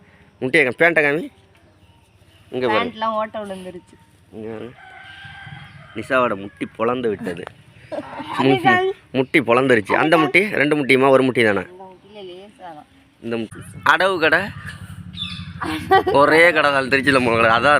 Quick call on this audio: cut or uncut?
cut